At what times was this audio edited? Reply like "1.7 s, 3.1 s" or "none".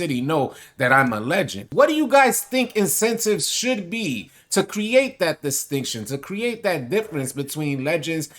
1.6 s